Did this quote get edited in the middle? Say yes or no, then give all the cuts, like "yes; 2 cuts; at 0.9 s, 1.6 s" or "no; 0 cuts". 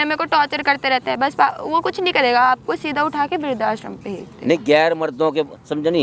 no; 0 cuts